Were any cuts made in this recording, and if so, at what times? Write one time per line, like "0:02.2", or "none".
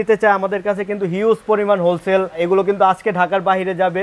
0:02.4